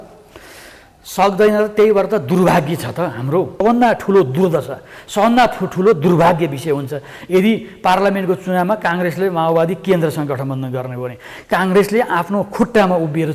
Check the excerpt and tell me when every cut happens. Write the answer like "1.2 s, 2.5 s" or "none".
3.6 s